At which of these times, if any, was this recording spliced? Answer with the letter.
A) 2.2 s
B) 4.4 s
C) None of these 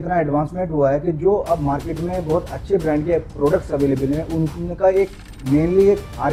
C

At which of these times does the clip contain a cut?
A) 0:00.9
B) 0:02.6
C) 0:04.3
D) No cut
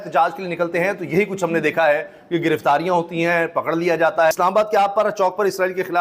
C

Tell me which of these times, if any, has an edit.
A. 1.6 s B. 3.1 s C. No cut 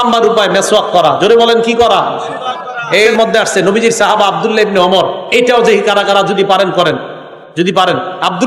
B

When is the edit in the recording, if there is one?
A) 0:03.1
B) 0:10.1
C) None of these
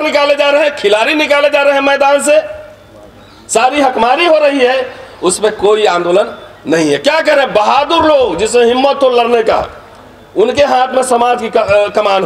C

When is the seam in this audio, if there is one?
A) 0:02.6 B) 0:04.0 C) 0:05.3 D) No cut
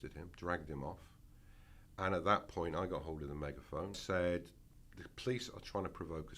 B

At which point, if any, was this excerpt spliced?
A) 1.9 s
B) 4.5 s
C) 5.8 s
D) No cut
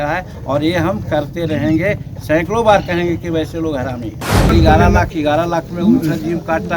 B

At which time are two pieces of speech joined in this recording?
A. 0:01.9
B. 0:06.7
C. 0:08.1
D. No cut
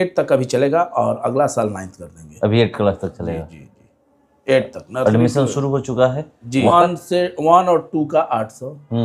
B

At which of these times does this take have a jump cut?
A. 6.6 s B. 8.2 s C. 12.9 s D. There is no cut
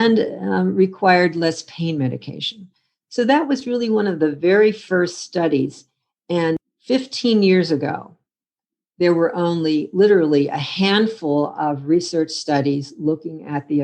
A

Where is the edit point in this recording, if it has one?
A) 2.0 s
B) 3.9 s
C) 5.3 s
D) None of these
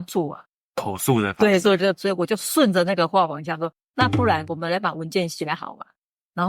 A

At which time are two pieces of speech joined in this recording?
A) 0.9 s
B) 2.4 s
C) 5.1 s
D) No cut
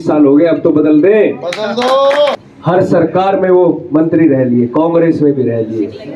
B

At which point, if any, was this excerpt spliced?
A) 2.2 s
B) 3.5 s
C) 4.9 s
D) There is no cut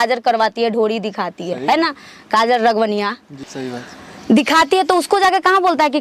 B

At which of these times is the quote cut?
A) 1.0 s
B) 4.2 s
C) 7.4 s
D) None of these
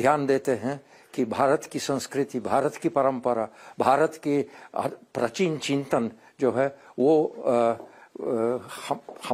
D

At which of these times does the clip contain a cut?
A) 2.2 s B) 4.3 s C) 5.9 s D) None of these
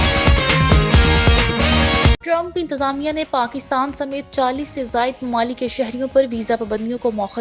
A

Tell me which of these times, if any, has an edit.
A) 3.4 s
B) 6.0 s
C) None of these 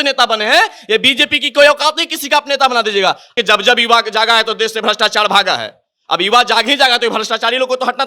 A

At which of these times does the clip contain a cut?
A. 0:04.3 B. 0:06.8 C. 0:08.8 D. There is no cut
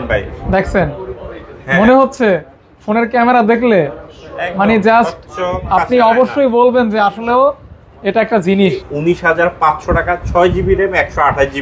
C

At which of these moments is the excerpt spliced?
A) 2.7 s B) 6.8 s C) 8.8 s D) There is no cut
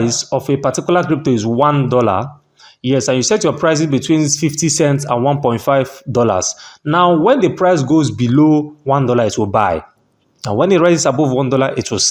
D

